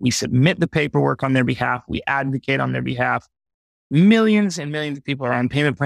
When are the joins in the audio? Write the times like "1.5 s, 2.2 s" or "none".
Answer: 3.7 s

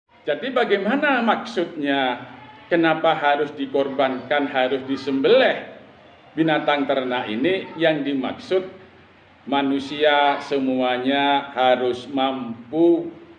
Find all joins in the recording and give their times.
none

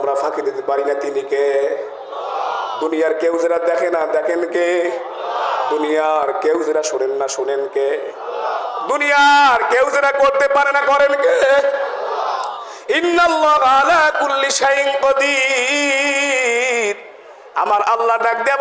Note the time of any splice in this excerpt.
none

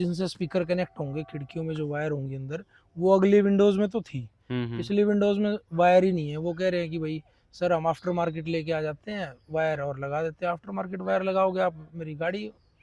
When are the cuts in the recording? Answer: none

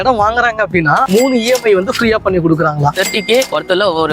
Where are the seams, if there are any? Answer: 1.1 s, 2.9 s

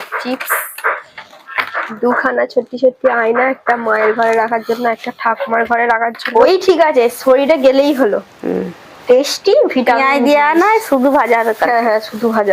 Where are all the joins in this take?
6.2 s

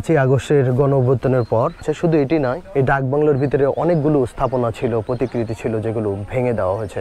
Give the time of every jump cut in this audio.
1.8 s, 2.6 s

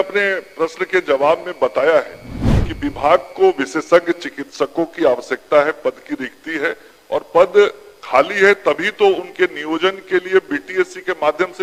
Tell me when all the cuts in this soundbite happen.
none

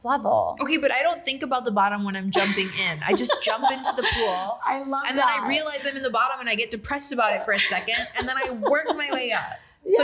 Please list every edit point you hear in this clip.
none

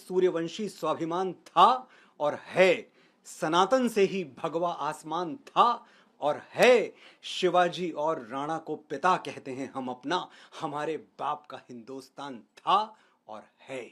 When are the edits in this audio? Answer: none

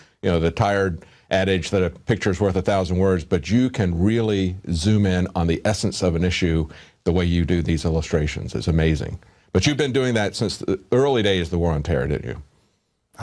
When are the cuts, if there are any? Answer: 6.2 s

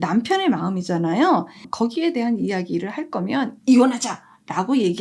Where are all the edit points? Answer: 1.6 s

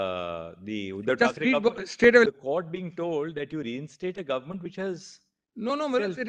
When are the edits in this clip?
2.3 s

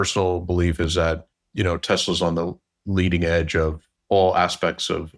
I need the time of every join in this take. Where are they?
1.4 s, 3.9 s

